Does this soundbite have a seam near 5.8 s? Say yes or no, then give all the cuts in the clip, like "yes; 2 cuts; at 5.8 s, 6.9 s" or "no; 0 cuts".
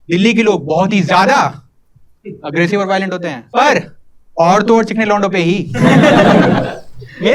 no; 1 cut; at 3.4 s